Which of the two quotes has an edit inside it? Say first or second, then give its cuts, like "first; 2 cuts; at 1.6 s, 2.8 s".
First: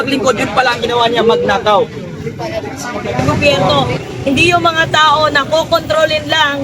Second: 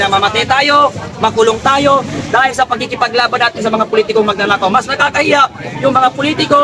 first; 1 cut; at 3.6 s